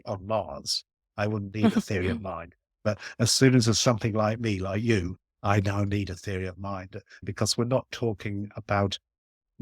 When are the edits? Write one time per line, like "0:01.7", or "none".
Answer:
0:07.2